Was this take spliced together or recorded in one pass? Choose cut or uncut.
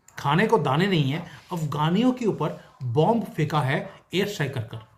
uncut